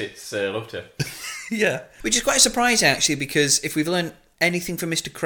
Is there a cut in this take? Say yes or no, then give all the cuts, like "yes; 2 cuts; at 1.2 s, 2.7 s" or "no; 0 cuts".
yes; 2 cuts; at 1.9 s, 4.2 s